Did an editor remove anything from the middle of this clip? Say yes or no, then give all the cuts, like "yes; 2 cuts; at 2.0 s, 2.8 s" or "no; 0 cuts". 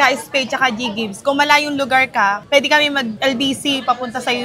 no; 0 cuts